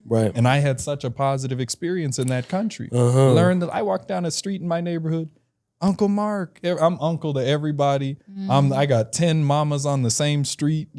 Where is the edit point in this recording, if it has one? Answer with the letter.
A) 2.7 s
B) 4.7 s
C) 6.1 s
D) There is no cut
D